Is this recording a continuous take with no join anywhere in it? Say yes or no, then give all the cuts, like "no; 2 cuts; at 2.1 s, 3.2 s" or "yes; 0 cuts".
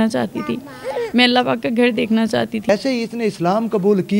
no; 1 cut; at 2.7 s